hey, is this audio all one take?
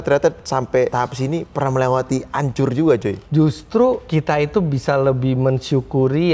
no; 2 cuts; at 0.9 s, 3.2 s

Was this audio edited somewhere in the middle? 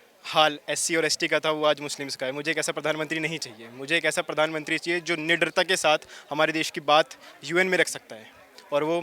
no; 0 cuts

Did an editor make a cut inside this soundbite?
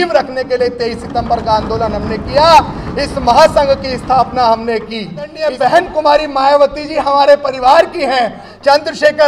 yes; 1 cut; at 5.4 s

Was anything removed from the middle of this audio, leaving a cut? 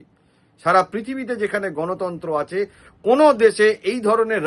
no; 0 cuts

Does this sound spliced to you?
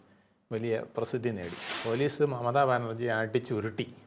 yes; 1 cut; at 1.6 s

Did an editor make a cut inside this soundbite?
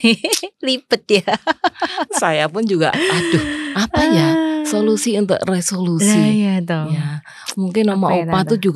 no; 0 cuts

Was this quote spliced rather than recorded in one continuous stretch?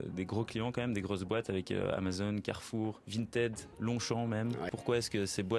yes; 2 cuts; at 3.0 s, 4.7 s

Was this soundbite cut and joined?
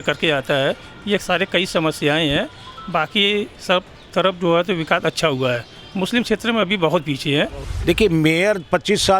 yes; 1 cut; at 7.6 s

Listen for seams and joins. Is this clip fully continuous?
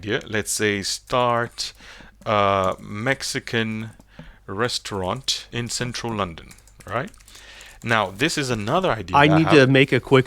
no; 1 cut; at 5.4 s

